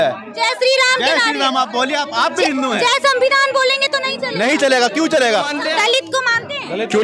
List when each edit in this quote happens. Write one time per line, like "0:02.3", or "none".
0:05.6